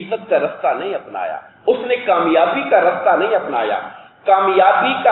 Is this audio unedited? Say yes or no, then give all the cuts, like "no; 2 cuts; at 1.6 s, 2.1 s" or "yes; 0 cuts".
yes; 0 cuts